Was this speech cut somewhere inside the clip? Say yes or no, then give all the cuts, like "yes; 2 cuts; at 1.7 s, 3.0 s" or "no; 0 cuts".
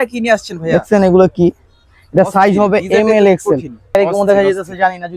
yes; 1 cut; at 3.9 s